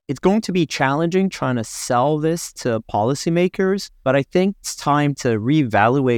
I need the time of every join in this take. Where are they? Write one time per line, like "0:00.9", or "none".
0:03.9
0:04.7